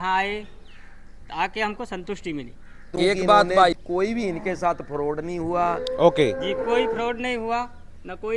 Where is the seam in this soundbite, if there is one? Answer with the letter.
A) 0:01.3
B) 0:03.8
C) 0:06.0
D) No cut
B